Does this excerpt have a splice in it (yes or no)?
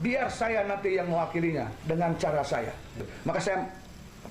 yes